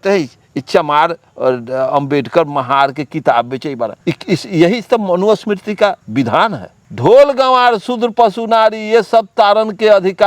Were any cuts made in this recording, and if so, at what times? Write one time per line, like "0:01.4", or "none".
0:04.0
0:06.5